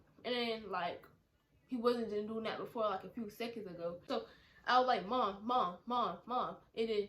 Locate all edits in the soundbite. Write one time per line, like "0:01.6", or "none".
0:04.0